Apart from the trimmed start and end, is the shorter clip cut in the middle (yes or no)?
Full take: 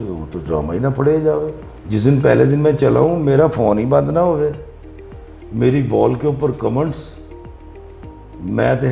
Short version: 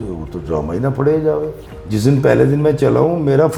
no